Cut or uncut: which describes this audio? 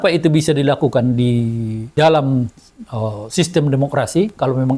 cut